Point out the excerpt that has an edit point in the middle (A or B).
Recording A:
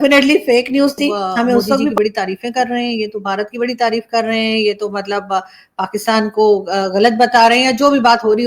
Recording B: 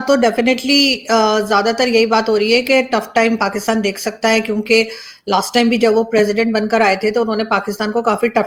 A